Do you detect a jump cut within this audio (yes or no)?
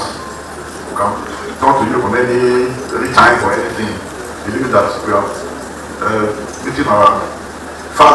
no